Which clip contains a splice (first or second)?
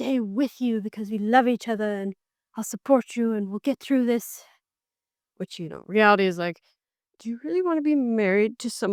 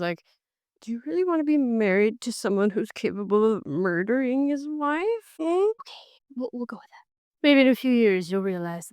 second